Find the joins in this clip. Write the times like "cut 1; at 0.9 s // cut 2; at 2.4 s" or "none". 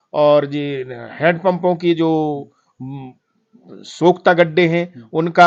none